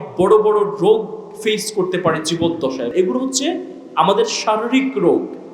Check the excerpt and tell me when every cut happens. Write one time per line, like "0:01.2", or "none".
0:02.9